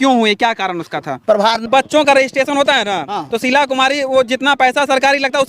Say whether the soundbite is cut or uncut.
cut